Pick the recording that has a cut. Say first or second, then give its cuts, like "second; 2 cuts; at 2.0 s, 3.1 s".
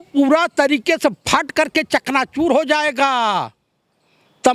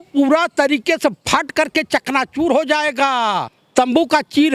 second; 1 cut; at 3.6 s